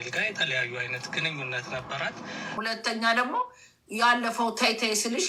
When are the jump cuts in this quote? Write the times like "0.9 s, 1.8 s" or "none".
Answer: 2.6 s

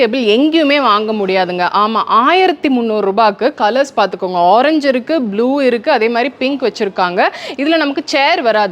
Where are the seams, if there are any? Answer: none

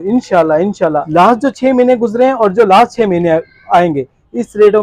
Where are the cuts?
1.1 s

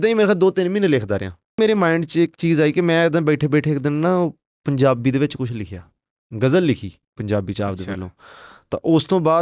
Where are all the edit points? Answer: 1.6 s

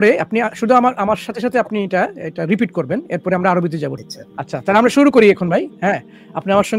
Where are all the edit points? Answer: 4.0 s

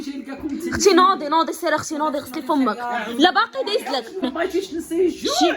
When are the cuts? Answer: 4.2 s

